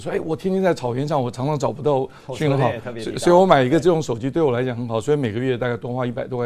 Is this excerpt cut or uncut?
uncut